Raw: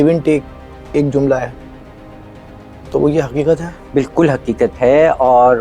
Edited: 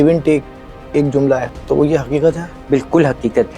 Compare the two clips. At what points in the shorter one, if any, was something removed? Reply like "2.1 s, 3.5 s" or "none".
1.5 s